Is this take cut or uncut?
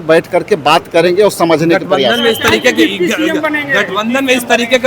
uncut